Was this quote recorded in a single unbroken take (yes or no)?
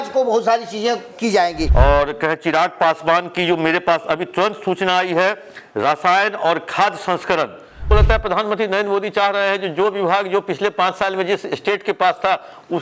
no